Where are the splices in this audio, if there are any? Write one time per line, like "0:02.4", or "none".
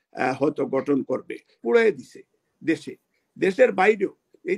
0:01.6